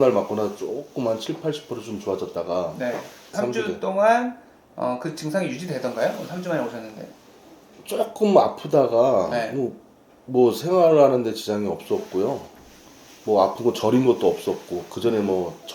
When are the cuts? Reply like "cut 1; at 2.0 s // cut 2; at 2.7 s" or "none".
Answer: cut 1; at 3.4 s